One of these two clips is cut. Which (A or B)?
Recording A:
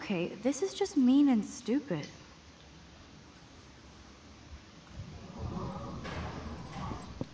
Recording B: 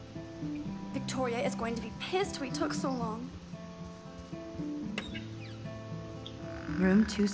A